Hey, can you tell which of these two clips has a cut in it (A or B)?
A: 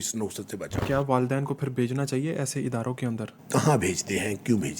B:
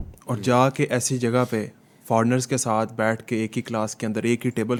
A